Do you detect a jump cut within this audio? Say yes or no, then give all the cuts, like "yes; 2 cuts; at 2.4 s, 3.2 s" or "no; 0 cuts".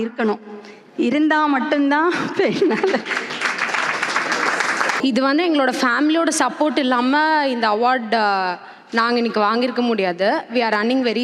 yes; 1 cut; at 5.0 s